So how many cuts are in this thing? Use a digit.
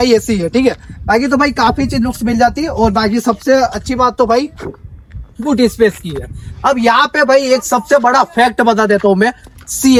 0